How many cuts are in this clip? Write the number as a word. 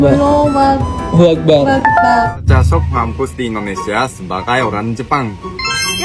one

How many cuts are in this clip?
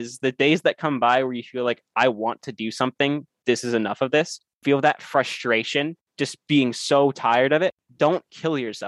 three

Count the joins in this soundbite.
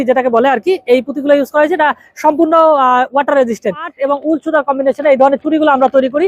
one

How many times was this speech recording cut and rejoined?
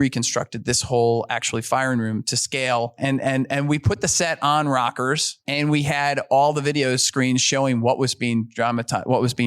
two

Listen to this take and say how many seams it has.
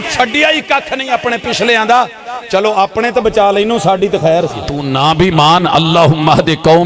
one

